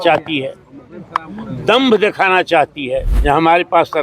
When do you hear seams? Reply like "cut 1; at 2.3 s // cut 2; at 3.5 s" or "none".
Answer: cut 1; at 3.1 s